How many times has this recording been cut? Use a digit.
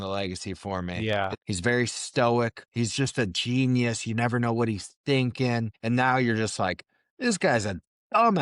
3